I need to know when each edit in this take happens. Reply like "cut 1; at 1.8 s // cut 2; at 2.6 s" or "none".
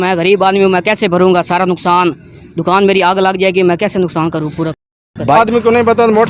cut 1; at 5.4 s